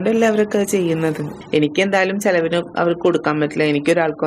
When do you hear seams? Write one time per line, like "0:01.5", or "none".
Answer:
0:01.3